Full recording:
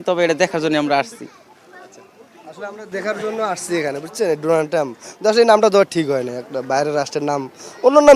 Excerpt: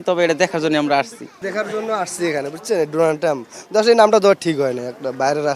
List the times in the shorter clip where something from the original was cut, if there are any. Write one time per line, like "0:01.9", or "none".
0:01.3